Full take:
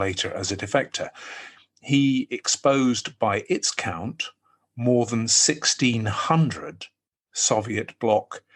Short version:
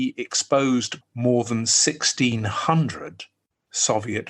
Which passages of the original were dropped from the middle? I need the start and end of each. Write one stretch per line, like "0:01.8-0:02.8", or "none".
0:03.1-0:04.6